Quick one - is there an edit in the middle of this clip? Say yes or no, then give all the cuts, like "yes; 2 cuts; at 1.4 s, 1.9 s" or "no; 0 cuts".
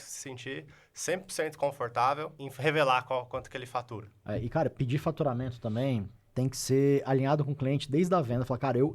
yes; 3 cuts; at 2.4 s, 4.2 s, 6.2 s